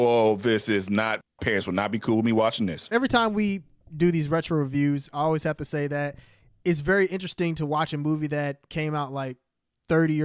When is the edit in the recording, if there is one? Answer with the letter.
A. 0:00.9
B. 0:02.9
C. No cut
B